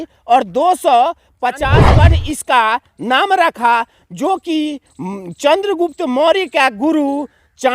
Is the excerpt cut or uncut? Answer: cut